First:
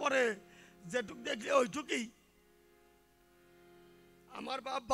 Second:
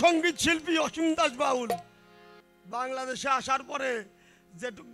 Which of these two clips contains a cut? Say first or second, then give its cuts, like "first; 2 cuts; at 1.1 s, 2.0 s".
second; 1 cut; at 2.5 s